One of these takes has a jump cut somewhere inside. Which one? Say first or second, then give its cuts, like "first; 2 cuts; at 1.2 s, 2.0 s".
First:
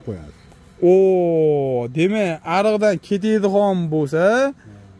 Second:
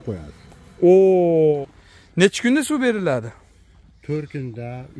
second; 1 cut; at 1.6 s